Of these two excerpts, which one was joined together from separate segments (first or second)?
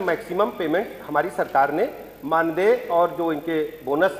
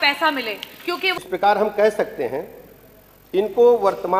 second